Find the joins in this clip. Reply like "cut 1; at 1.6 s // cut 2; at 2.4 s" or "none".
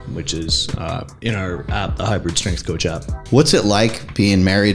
cut 1; at 3.2 s

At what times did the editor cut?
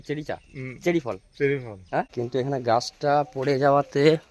cut 1; at 2.1 s

